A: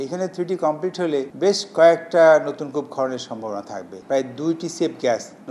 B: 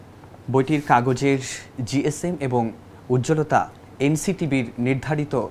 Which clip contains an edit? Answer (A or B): A